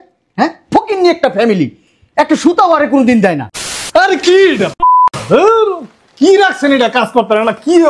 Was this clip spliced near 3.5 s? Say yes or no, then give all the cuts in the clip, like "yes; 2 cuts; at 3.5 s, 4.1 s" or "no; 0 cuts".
yes; 1 cut; at 3.5 s